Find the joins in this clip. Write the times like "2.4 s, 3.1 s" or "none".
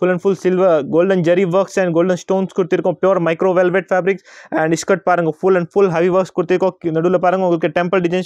none